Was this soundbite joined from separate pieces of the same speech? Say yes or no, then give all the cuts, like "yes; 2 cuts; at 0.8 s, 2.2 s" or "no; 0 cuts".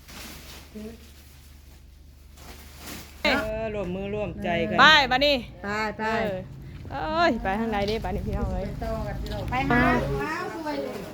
yes; 2 cuts; at 3.2 s, 9.7 s